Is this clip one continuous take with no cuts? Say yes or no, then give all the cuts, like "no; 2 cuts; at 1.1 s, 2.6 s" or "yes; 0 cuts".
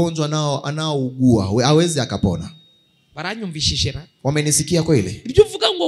yes; 0 cuts